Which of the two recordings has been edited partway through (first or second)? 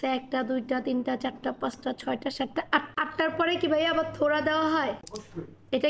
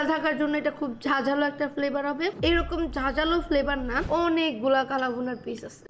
second